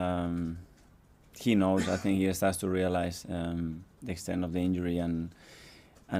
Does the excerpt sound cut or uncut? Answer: uncut